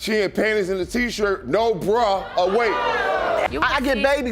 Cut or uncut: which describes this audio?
cut